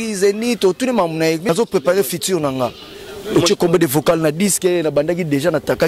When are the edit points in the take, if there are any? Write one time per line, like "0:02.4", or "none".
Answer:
0:01.4